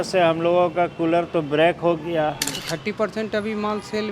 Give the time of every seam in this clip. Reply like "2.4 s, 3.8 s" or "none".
2.6 s